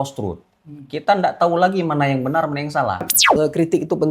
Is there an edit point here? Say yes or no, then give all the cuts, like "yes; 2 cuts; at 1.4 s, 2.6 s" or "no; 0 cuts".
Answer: yes; 1 cut; at 3.2 s